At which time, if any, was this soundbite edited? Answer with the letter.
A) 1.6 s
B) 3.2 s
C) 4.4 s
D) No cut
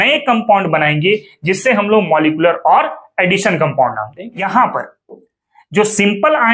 C